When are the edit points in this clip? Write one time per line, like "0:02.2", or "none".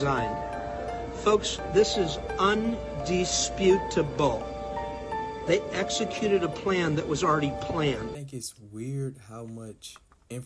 0:08.2